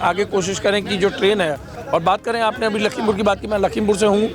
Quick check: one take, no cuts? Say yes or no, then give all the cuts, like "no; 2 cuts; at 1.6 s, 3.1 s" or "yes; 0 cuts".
no; 1 cut; at 1.7 s